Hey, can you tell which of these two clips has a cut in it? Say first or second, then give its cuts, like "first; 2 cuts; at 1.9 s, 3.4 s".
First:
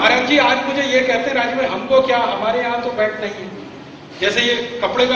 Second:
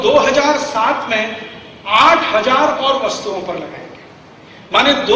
first; 1 cut; at 2.5 s